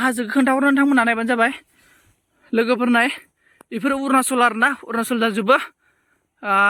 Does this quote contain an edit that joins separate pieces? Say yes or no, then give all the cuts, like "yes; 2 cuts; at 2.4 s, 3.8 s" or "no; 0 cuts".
no; 0 cuts